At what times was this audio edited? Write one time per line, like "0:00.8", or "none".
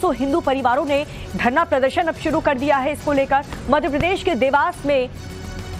0:04.0